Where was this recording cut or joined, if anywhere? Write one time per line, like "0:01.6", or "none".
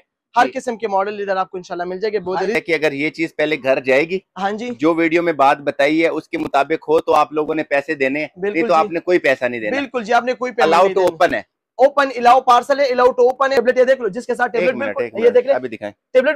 0:02.6
0:13.6